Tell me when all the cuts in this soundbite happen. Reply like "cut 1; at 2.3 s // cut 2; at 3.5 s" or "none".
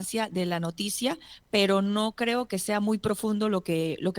cut 1; at 1.3 s